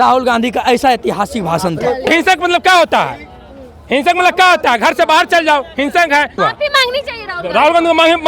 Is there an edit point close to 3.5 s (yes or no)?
no